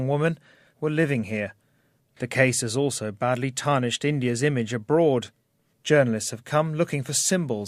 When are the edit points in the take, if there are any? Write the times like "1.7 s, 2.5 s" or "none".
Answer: 5.5 s